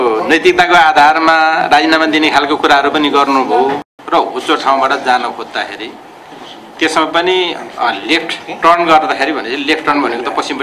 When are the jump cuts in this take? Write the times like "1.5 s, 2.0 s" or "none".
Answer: 3.9 s